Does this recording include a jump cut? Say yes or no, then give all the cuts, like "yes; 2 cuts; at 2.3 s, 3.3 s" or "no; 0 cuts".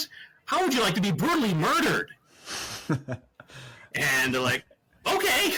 no; 0 cuts